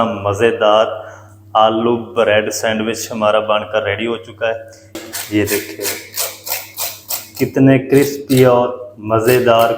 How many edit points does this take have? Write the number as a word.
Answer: one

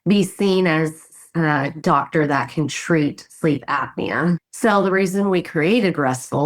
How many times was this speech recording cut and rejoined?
two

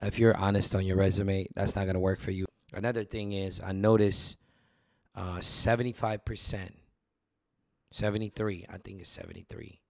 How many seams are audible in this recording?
one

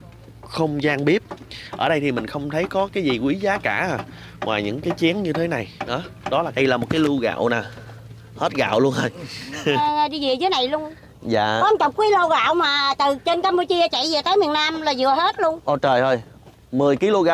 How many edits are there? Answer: two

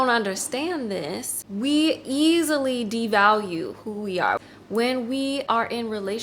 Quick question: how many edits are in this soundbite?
two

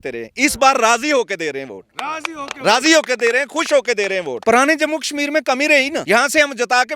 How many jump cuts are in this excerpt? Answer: two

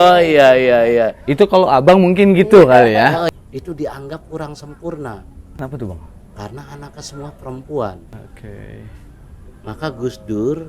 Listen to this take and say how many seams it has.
three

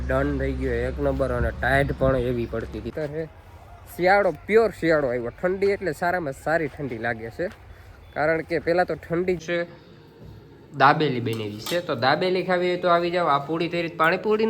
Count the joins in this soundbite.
two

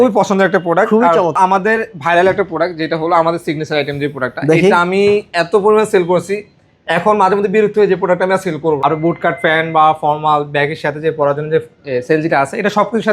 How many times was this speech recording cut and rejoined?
two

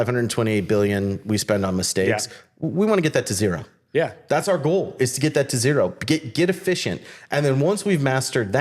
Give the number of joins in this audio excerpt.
zero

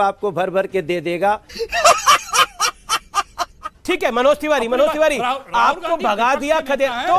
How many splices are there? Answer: one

